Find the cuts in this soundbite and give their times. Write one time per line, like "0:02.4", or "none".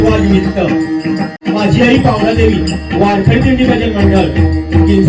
0:01.3